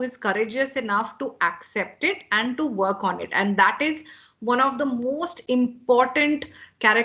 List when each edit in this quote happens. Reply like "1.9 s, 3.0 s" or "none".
none